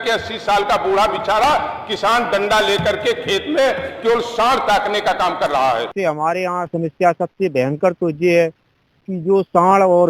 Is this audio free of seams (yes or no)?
no